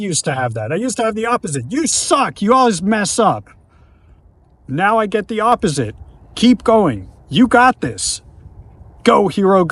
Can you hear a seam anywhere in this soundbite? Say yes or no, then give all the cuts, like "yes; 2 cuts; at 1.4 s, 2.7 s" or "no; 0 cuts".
no; 0 cuts